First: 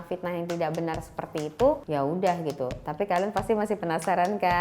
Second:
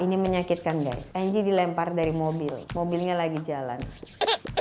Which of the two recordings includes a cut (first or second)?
second